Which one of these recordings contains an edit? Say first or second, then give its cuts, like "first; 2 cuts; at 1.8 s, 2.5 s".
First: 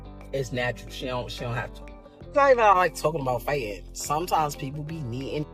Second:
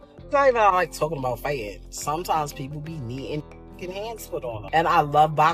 second; 1 cut; at 4.6 s